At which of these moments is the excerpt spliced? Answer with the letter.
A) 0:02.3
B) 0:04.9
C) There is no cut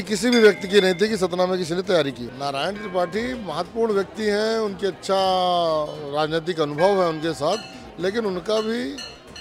A